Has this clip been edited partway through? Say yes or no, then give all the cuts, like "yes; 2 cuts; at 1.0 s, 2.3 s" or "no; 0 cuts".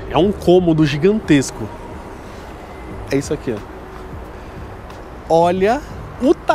no; 0 cuts